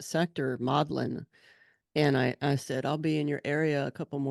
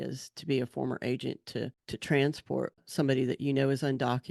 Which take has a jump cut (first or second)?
second